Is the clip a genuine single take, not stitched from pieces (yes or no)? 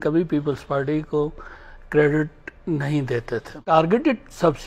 no